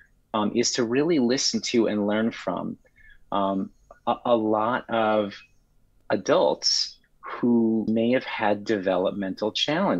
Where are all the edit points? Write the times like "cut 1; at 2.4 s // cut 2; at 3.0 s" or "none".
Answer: cut 1; at 7.9 s

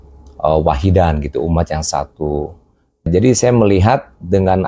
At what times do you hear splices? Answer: cut 1; at 3.1 s

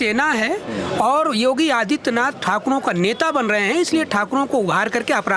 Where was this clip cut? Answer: none

